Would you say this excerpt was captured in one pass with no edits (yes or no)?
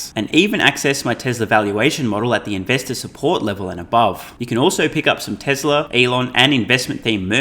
no